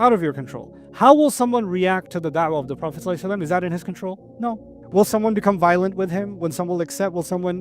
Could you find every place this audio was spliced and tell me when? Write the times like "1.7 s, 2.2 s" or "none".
4.5 s